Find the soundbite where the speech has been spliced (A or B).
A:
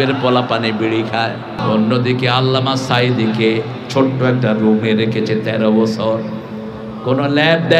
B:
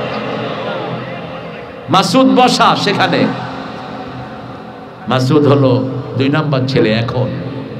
A